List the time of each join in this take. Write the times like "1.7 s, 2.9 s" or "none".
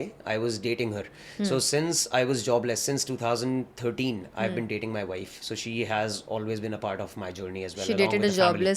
none